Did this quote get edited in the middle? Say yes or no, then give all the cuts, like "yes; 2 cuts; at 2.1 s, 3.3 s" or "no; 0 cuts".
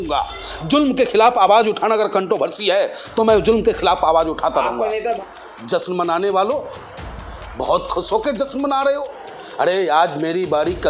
yes; 1 cut; at 5.2 s